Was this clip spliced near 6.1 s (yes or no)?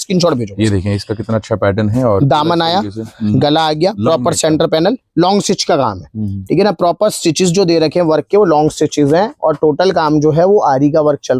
no